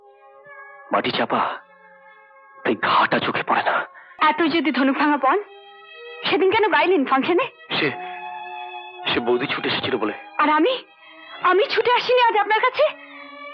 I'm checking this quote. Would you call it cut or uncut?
cut